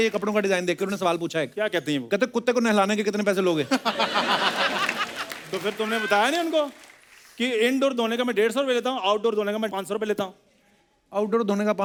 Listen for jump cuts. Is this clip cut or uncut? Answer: uncut